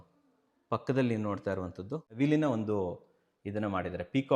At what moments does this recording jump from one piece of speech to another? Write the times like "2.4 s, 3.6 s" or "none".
2.1 s